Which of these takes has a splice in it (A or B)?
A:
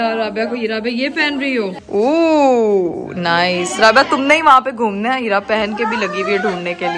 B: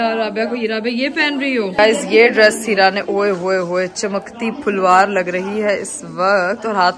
B